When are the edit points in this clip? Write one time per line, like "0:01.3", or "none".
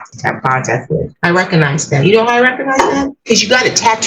0:01.1